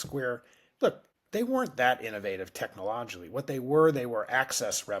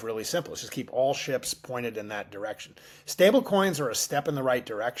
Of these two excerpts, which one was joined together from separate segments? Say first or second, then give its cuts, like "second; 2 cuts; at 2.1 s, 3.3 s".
first; 1 cut; at 1.1 s